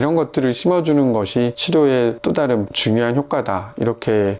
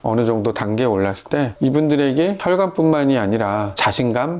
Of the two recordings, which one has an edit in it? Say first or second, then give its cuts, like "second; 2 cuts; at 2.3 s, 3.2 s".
second; 1 cut; at 1.5 s